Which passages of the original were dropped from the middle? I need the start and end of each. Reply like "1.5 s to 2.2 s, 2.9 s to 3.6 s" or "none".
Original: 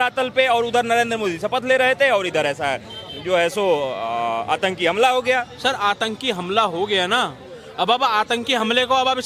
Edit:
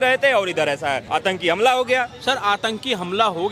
2.8 s to 4.4 s